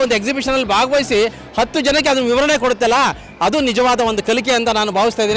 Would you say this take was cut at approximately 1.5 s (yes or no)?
no